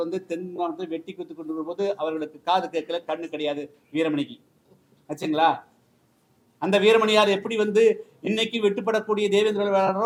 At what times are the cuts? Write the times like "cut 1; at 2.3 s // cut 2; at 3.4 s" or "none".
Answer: none